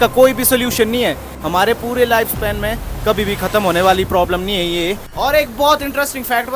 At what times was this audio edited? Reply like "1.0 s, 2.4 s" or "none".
1.3 s, 5.1 s